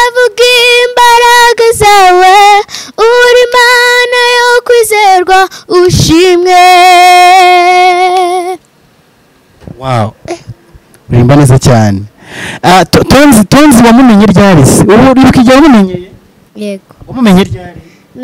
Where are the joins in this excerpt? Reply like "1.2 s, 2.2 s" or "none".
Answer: none